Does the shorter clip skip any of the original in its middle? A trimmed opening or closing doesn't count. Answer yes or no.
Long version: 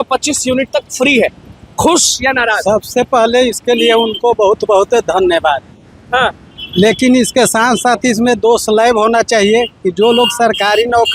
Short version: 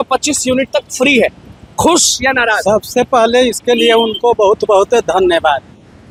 no